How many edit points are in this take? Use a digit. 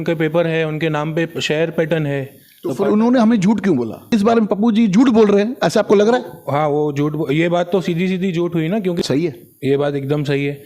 2